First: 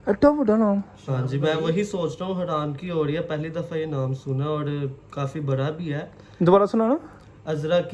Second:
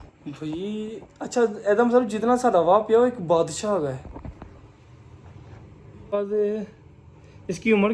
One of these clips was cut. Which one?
second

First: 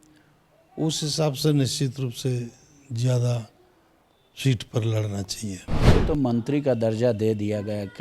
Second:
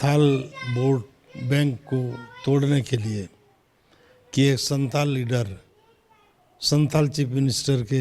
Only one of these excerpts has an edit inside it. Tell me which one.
first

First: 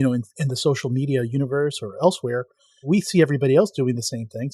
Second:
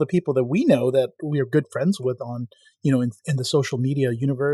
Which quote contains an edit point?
first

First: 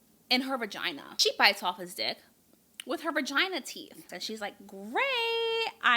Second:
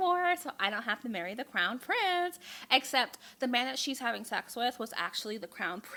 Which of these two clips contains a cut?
first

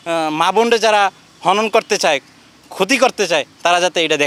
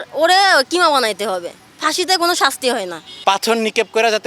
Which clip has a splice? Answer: second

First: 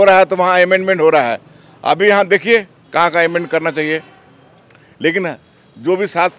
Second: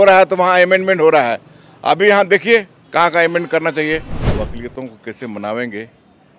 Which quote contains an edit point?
second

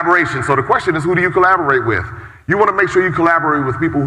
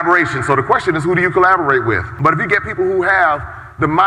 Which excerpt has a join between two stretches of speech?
second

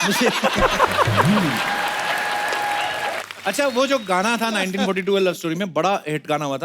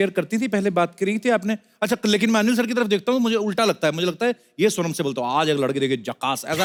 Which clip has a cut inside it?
first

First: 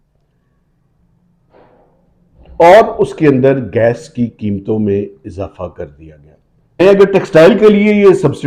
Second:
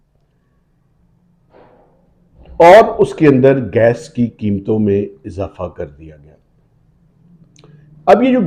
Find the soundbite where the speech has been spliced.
first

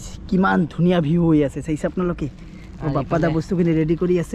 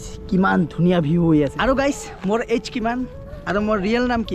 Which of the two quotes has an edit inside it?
second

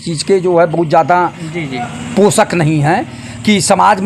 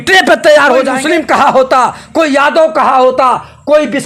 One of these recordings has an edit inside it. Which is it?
second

